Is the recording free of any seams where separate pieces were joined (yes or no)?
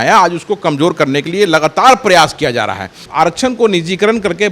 no